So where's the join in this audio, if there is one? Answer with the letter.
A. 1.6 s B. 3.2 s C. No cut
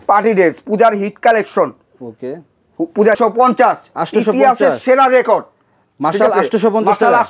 B